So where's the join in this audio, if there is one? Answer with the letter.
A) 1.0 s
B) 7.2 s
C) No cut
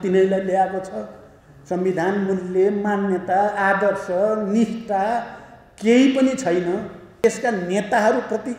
B